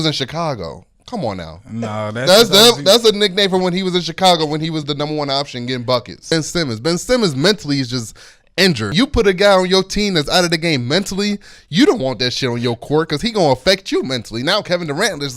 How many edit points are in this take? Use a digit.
2